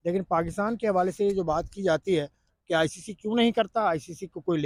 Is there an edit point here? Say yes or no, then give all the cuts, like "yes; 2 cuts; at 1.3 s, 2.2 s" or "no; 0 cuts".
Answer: no; 0 cuts